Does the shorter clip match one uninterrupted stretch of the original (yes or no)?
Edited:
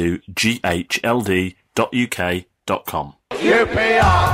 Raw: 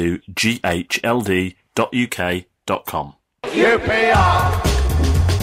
no